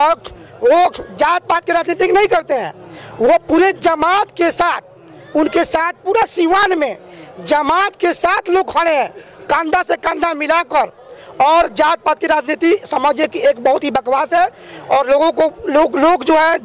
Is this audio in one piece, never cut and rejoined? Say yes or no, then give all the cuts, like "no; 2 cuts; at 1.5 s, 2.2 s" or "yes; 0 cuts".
yes; 0 cuts